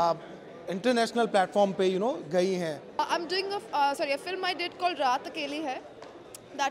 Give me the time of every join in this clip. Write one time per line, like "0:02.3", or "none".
0:03.0